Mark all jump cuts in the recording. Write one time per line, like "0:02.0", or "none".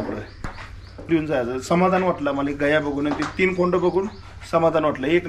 0:01.1